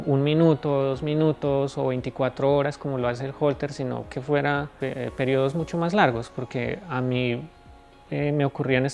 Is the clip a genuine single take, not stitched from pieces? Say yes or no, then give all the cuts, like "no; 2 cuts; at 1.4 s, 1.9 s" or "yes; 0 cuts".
no; 1 cut; at 4.7 s